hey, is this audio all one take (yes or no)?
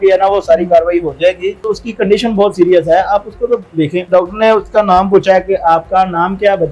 no